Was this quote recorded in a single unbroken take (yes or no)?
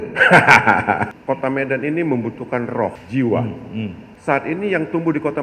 no